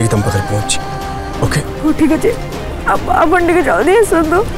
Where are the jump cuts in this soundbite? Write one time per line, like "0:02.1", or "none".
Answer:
0:01.7